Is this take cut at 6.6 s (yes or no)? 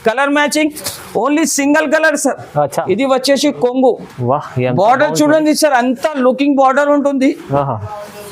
no